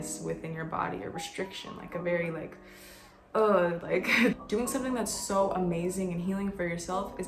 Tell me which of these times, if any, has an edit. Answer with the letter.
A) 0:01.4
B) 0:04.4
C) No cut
B